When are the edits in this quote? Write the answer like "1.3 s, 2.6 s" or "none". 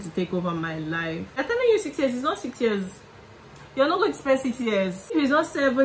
1.3 s, 5.1 s

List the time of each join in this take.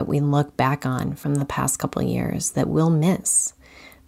1.2 s

